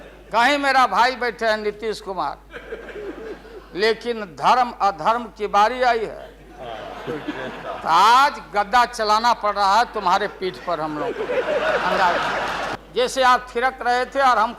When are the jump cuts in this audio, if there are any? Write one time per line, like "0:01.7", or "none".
0:12.8